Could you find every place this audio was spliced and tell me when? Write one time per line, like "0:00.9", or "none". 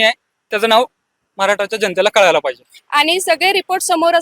0:02.7